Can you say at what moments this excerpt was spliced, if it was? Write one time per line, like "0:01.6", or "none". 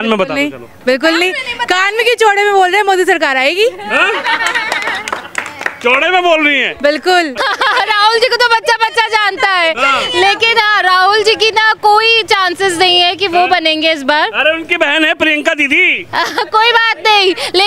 0:07.4